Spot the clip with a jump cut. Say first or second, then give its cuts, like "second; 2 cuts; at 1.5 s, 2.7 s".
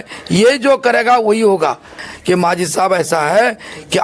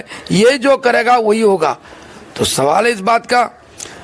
first; 1 cut; at 2.1 s